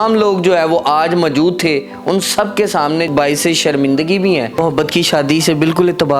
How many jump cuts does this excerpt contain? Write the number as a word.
two